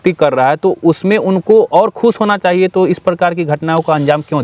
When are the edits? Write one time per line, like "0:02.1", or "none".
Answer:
none